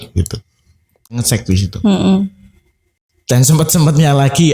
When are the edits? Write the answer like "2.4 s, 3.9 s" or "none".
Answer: 1.2 s

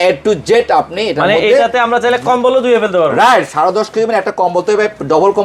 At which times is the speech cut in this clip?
none

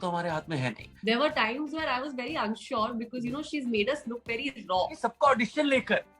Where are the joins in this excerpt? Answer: 0.9 s, 4.9 s

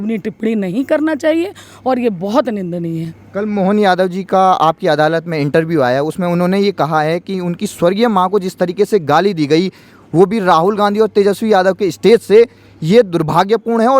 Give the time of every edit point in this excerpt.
none

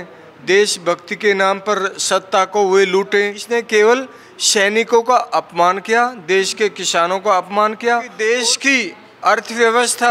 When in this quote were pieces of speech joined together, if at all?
3.4 s, 8.1 s

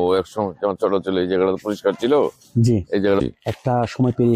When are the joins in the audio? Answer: 3.2 s

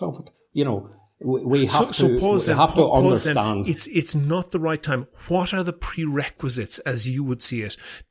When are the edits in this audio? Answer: none

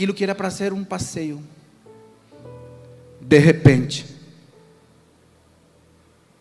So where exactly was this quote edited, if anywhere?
none

